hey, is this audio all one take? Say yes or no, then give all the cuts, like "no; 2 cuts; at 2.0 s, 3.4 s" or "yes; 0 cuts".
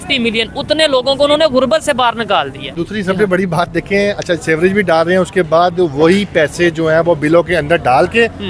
no; 1 cut; at 2.8 s